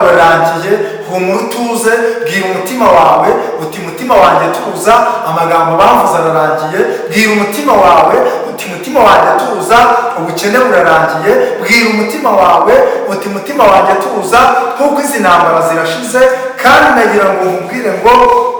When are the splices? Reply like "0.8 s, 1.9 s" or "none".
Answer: none